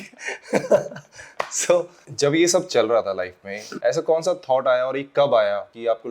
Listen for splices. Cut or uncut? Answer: uncut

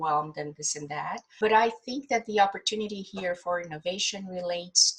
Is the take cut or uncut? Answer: cut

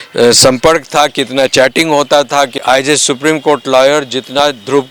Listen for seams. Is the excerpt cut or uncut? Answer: cut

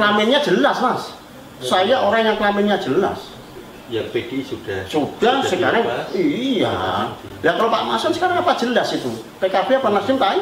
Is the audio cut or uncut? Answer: uncut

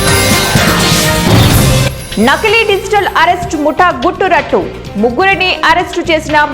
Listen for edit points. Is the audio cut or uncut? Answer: uncut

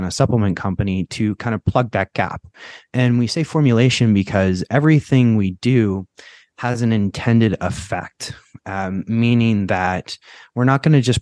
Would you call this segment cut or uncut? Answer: uncut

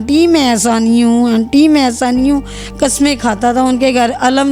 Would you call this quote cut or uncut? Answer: uncut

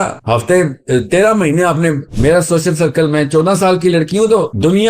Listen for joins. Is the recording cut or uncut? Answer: cut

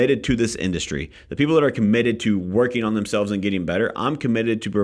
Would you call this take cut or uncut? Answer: uncut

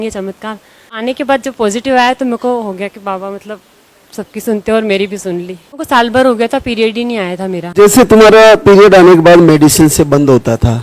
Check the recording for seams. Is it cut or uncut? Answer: cut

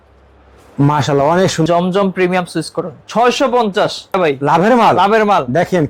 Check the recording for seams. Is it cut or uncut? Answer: cut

